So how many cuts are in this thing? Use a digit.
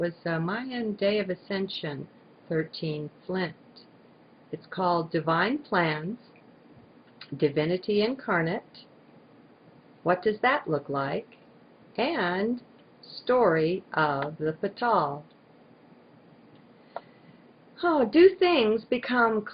1